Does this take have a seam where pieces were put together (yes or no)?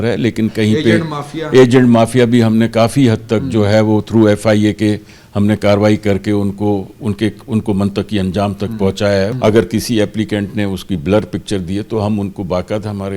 yes